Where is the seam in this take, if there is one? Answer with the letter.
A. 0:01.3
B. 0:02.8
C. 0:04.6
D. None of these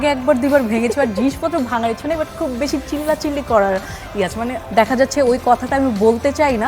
C